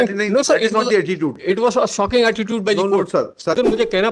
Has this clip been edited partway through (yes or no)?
yes